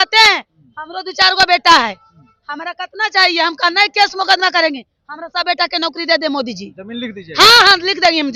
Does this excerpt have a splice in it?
no; 0 cuts

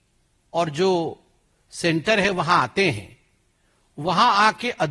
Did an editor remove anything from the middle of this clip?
no; 0 cuts

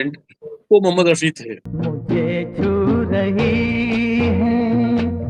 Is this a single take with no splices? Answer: yes; 0 cuts

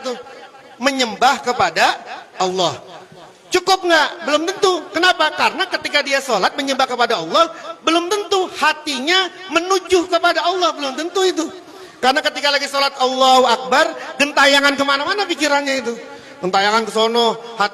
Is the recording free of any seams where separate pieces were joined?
yes; 0 cuts

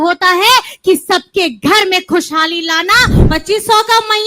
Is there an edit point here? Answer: yes; 1 cut; at 3.2 s

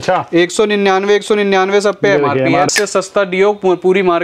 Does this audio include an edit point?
yes; 1 cut; at 2.7 s

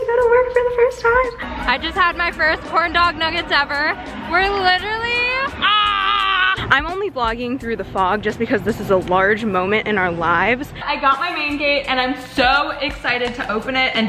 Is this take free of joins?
no; 3 cuts; at 1.4 s, 6.6 s, 10.8 s

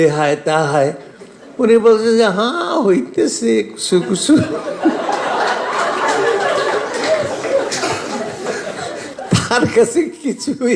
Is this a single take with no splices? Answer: no; 1 cut; at 9.1 s

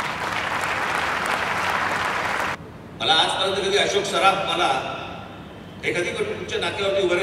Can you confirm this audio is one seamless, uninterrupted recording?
no; 1 cut; at 2.5 s

